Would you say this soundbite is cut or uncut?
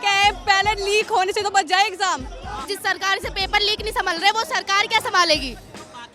cut